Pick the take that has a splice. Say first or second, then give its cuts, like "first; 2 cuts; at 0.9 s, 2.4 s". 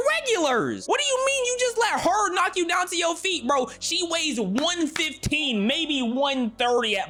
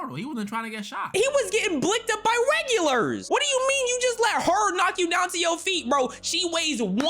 second; 1 cut; at 1.1 s